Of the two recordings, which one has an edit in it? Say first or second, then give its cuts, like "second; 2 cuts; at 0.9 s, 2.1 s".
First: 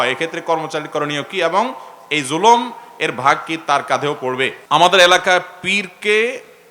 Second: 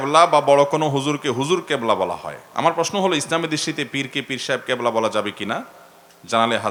first; 1 cut; at 4.6 s